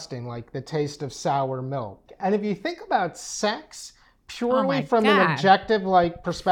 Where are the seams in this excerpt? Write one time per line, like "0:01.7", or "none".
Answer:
0:02.1